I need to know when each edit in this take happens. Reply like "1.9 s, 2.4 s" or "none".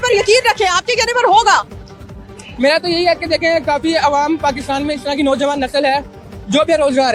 none

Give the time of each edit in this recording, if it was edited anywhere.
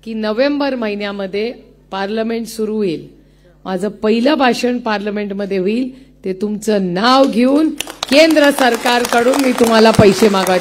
none

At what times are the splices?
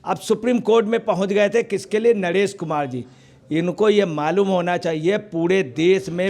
none

